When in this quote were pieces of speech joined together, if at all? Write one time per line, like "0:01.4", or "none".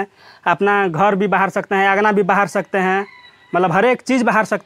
none